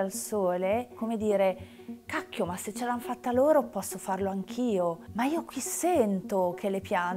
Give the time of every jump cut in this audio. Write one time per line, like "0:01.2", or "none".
0:05.0